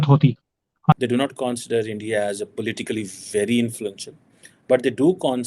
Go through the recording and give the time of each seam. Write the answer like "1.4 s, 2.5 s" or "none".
0.9 s